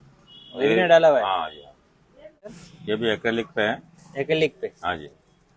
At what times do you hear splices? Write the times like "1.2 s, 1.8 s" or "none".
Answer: 2.6 s